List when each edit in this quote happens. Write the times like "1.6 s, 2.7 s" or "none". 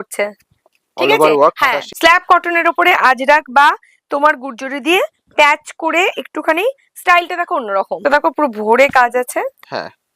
1.9 s, 8.0 s

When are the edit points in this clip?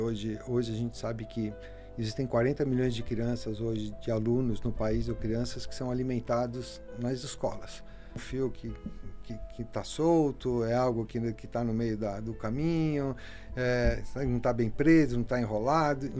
8.2 s

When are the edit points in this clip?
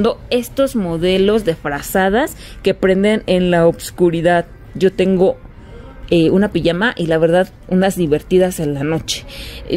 none

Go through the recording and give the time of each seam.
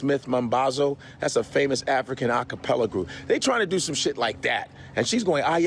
none

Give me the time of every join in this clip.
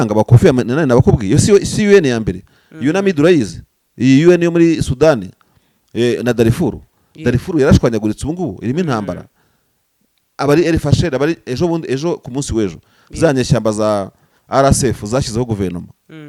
none

